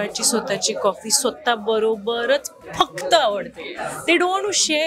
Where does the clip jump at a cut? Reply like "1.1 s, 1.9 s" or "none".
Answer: none